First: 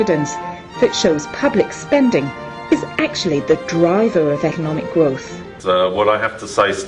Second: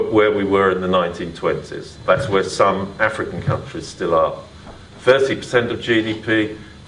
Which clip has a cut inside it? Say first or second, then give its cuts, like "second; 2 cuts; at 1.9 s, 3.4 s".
first; 1 cut; at 3.6 s